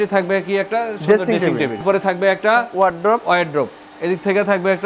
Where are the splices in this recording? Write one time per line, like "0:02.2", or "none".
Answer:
0:01.8